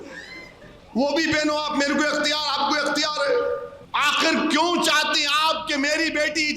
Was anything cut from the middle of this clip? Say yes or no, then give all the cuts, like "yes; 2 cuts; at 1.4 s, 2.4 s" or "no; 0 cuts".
yes; 1 cut; at 3.8 s